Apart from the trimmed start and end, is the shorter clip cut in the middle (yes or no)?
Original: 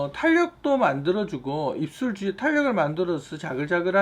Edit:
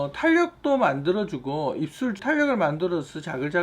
yes